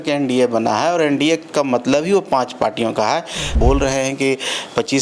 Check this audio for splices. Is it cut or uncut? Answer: cut